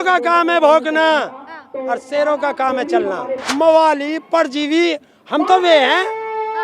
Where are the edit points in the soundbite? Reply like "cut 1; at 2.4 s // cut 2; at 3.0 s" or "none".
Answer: cut 1; at 3.4 s